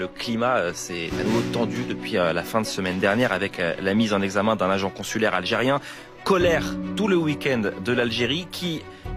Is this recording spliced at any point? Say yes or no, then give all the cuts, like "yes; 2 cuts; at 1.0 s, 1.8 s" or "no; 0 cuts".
no; 0 cuts